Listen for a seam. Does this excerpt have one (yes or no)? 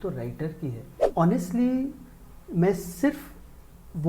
yes